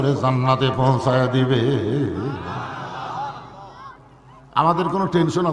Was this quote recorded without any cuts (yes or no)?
yes